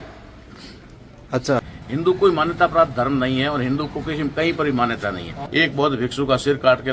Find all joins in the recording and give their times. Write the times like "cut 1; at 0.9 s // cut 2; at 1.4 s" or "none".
cut 1; at 1.6 s // cut 2; at 5.4 s